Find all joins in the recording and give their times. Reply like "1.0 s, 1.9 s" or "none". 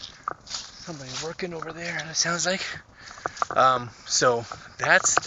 none